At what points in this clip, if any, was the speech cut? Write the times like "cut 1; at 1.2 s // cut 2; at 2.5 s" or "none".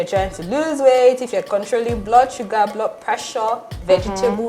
cut 1; at 1.4 s